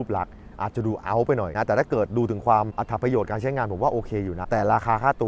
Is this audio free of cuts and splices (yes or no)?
no